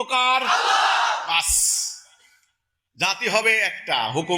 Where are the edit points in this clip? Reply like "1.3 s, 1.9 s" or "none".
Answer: none